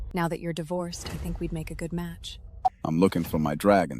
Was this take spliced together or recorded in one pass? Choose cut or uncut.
cut